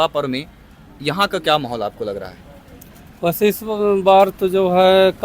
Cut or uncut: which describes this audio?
uncut